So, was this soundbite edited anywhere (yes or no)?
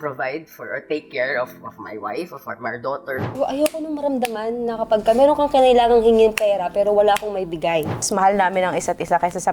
yes